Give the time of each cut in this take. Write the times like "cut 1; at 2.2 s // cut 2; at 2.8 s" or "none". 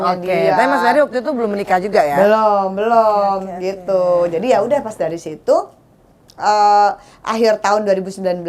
none